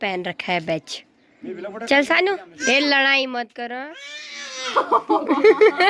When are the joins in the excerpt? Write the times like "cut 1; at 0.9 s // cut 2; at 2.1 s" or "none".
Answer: cut 1; at 2.5 s

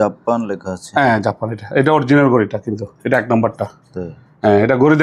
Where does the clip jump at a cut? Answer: none

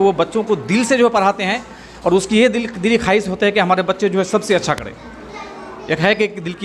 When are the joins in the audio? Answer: none

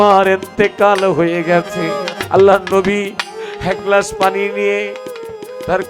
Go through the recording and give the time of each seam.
cut 1; at 2.1 s

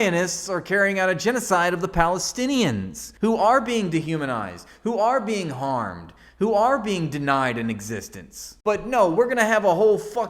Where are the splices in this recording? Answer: none

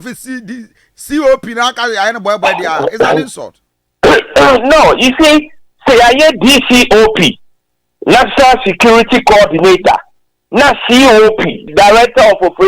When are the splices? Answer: cut 1; at 11.7 s

